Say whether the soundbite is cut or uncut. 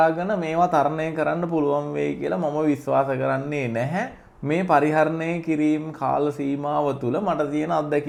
uncut